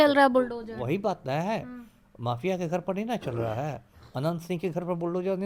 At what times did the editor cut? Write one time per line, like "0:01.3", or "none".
none

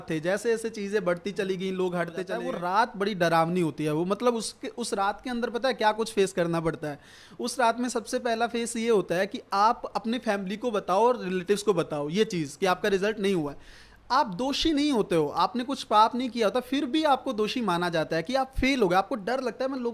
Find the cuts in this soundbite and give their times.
0:02.4

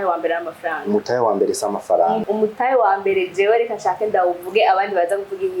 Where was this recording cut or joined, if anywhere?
0:02.2

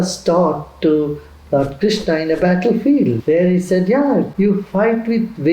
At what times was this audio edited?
0:03.2
0:04.3

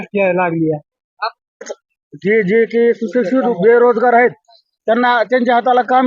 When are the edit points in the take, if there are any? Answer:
0:01.8

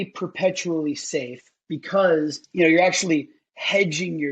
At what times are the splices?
0:02.4

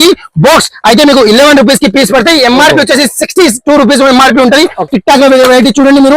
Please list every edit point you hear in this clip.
0:04.9

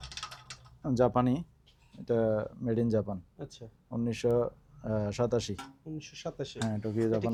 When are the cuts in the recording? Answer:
none

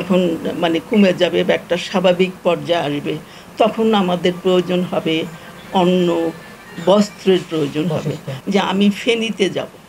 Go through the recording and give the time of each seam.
0:08.3

